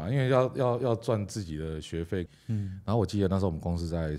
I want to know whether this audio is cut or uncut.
cut